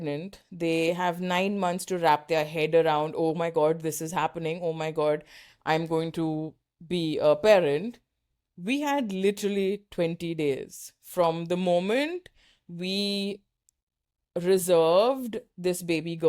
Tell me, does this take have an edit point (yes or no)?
no